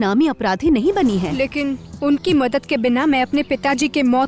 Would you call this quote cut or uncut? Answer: cut